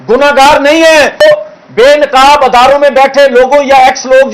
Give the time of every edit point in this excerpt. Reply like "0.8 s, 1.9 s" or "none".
1.2 s